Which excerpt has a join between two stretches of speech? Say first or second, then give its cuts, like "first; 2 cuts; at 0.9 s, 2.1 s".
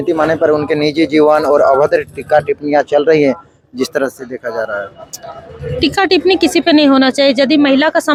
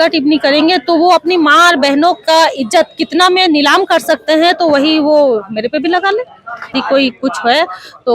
second; 1 cut; at 6.8 s